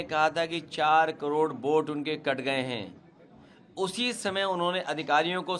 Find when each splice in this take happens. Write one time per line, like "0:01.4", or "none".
none